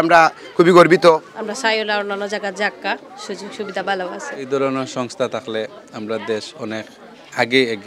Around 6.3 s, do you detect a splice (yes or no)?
no